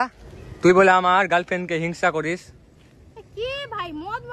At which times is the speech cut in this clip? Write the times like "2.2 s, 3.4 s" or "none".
none

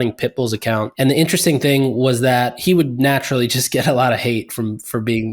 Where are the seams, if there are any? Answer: 0.9 s, 2.5 s

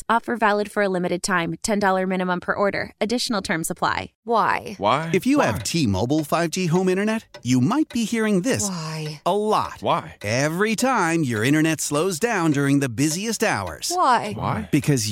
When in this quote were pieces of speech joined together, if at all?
4.1 s

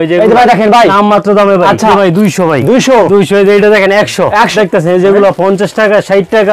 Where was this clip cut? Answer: 1.9 s, 4.5 s

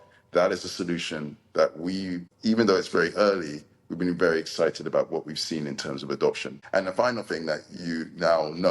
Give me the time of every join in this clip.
2.3 s, 6.5 s

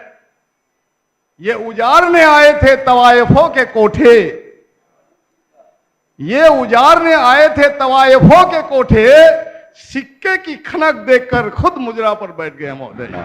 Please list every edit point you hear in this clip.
none

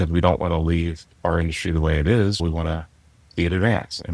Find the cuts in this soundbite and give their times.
2.4 s

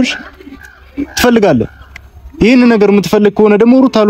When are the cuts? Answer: none

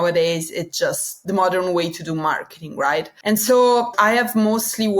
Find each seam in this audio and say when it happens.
1.1 s

